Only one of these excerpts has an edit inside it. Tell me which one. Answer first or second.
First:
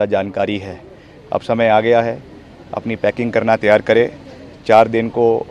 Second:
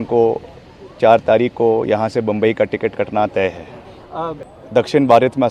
second